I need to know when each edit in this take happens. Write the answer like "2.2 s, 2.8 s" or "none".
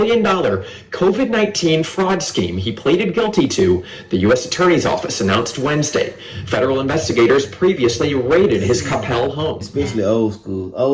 9.7 s

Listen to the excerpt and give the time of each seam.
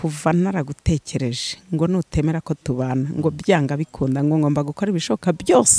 none

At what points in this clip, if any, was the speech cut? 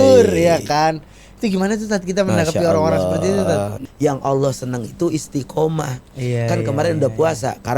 3.8 s

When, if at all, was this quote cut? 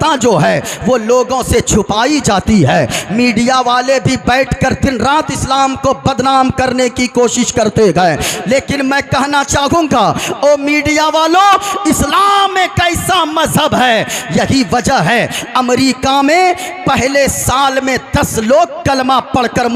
none

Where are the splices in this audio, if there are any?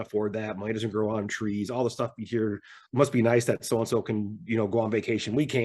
2.8 s

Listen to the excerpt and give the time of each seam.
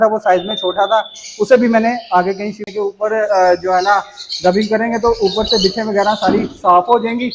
2.7 s

